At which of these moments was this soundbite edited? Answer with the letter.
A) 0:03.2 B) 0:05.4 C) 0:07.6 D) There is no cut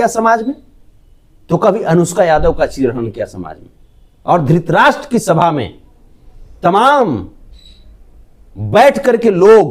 D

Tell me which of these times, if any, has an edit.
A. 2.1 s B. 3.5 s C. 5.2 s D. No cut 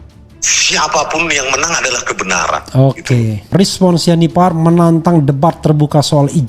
B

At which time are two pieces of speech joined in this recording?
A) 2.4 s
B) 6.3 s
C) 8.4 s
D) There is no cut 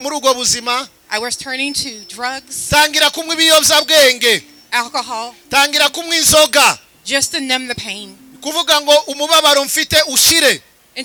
D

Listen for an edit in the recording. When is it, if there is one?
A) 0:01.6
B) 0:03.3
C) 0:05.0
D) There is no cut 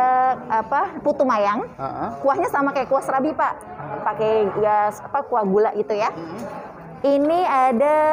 D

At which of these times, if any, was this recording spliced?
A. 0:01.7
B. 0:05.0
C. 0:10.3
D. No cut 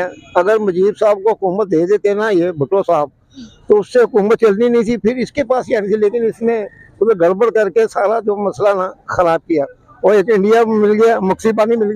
D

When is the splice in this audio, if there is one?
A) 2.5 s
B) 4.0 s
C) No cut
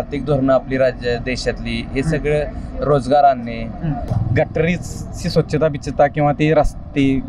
B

